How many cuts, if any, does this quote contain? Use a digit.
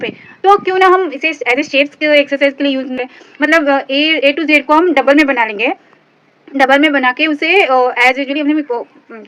0